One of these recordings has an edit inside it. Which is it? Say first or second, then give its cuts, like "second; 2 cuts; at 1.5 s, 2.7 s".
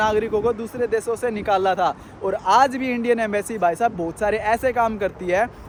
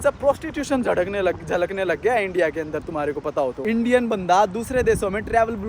second; 1 cut; at 3.6 s